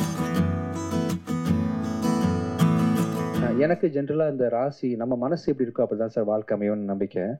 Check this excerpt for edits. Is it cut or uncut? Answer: cut